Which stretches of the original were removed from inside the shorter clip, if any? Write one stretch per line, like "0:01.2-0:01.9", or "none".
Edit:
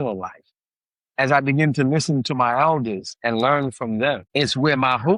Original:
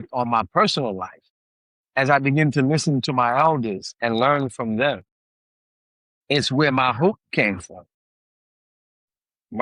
0:05.0-0:06.2